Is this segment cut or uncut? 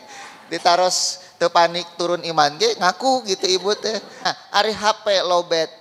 cut